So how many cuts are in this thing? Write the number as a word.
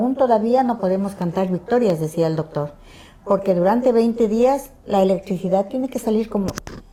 zero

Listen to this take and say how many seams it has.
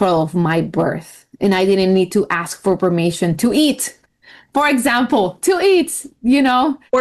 zero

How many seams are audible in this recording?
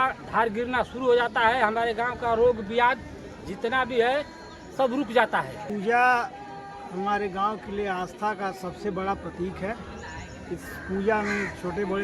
one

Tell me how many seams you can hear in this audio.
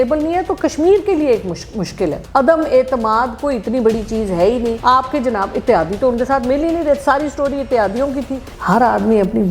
three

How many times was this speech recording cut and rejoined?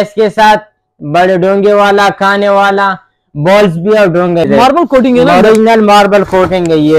one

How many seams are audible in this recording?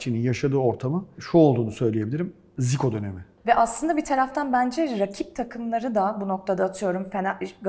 two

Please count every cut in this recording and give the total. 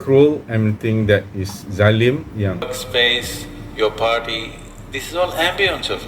one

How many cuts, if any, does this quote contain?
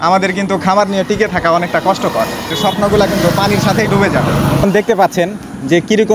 two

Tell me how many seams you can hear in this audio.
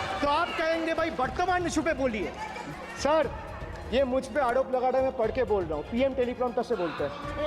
one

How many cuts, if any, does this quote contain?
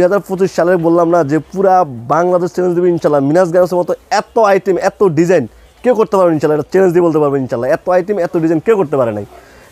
zero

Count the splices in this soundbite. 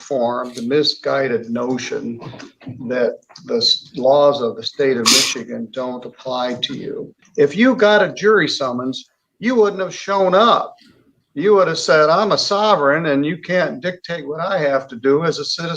one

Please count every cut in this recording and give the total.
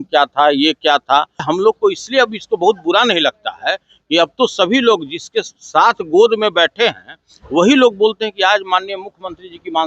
one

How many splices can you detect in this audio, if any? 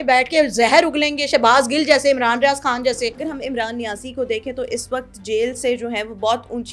one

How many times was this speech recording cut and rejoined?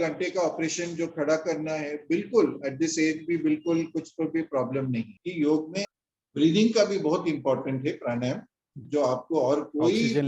two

